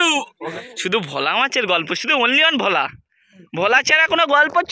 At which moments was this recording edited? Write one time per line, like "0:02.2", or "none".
none